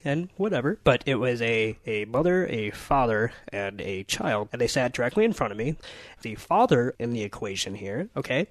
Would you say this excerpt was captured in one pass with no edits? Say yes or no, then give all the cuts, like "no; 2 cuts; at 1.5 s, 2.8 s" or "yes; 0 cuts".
no; 3 cuts; at 4.5 s, 6.0 s, 7.0 s